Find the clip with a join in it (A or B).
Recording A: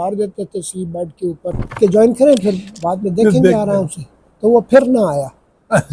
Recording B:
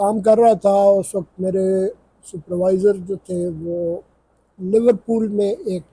A